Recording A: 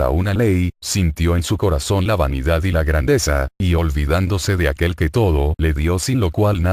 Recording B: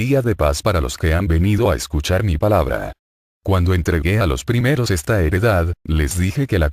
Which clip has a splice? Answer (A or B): A